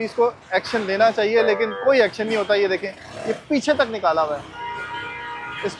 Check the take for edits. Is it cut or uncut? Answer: uncut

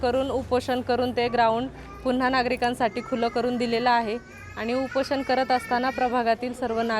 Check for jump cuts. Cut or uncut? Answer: uncut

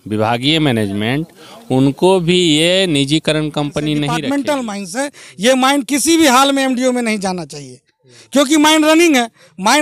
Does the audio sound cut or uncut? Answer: cut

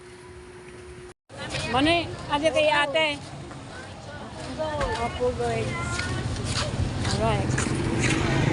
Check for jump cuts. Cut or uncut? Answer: cut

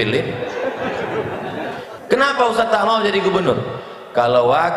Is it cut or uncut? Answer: cut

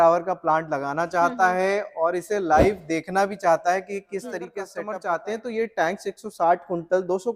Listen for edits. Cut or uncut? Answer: cut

